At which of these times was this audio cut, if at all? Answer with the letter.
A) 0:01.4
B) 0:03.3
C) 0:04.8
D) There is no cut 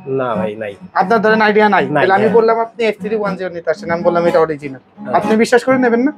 D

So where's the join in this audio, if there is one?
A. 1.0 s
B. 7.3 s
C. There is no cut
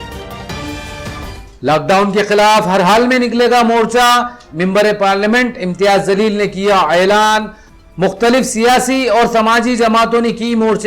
A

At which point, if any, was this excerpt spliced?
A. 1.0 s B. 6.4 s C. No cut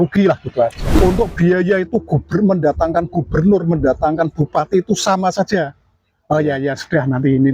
A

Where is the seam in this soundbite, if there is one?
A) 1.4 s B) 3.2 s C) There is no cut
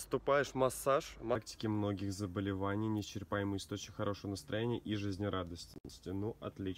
A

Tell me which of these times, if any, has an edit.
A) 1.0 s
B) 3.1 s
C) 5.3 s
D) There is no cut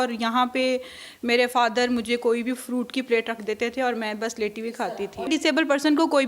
C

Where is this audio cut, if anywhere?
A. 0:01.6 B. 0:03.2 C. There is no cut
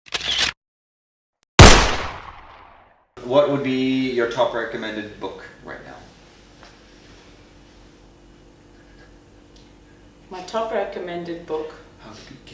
B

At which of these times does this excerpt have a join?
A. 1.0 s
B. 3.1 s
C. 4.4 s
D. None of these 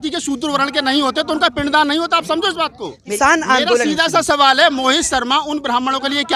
B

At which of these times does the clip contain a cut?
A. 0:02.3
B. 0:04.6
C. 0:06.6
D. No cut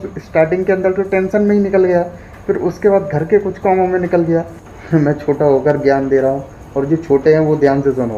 B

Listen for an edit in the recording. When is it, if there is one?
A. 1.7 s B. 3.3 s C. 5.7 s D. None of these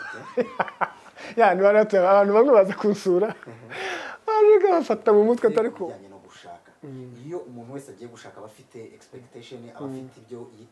C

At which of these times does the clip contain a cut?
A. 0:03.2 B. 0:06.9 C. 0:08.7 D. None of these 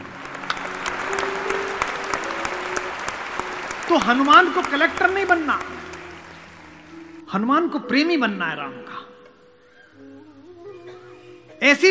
A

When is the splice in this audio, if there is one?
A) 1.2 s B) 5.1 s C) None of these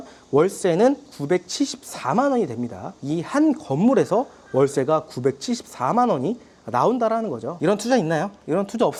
C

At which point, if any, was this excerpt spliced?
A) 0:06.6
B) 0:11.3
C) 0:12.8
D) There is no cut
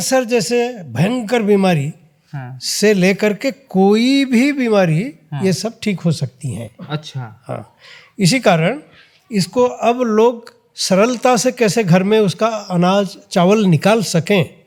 D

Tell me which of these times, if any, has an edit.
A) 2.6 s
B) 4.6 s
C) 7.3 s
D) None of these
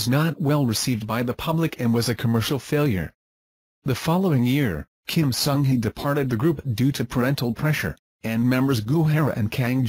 B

